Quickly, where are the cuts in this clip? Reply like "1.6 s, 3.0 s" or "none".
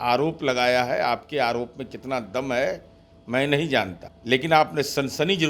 4.1 s